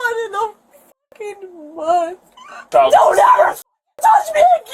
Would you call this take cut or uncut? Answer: cut